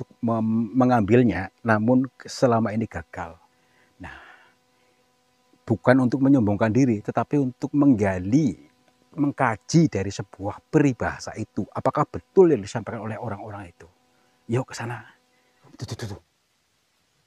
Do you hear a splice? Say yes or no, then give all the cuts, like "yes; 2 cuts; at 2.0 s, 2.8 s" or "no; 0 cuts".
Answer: yes; 1 cut; at 15.7 s